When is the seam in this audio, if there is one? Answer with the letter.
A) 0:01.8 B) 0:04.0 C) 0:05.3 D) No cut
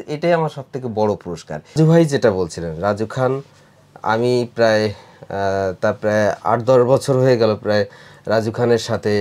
A